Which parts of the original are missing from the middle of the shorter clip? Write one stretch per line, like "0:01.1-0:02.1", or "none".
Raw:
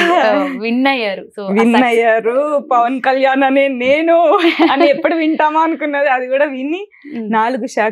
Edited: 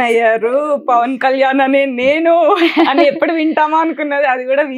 none